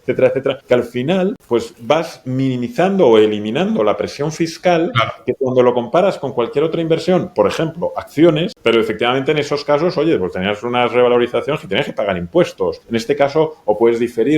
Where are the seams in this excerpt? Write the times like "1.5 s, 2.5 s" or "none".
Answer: 8.5 s